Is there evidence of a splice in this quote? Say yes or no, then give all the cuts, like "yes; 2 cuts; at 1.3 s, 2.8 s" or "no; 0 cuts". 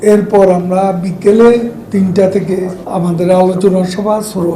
yes; 2 cuts; at 1.8 s, 2.8 s